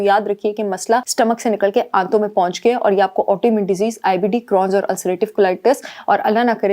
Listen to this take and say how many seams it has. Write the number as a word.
one